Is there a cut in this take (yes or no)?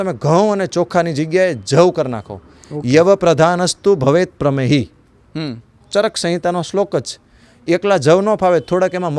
no